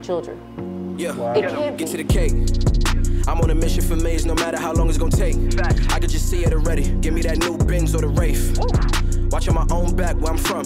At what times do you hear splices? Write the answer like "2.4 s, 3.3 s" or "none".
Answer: 1.8 s